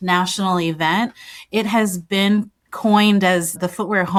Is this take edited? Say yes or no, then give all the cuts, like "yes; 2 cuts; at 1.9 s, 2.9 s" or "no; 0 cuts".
no; 0 cuts